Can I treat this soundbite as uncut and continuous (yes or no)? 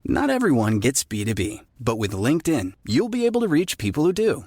yes